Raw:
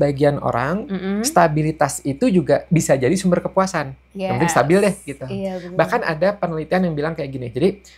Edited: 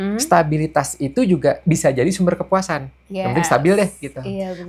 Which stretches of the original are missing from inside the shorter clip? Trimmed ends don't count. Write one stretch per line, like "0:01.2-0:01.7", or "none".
none

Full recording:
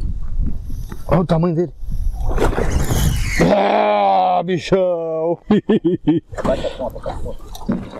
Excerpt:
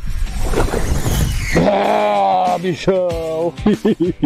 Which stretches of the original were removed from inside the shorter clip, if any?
none

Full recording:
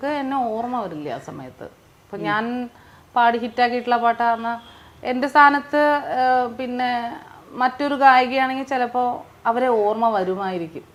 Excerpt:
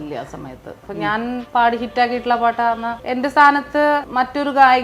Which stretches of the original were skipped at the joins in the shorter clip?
0:02.1-0:02.7
0:04.6-0:04.9
0:06.1-0:07.5

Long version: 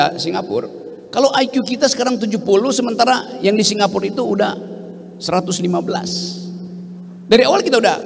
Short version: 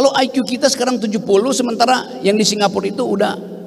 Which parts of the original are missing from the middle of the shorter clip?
none

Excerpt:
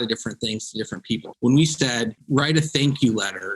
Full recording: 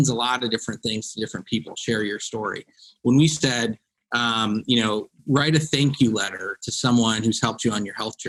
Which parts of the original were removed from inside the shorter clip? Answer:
0:01.7-0:02.9
0:03.8-0:05.2

